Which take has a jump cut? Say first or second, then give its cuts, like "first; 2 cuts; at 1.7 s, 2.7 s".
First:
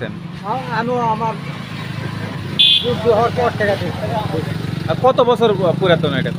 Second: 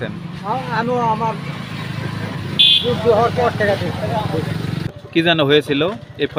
second; 1 cut; at 5.0 s